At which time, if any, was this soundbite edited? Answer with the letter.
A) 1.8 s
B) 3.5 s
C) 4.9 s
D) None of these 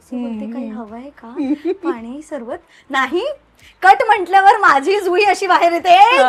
D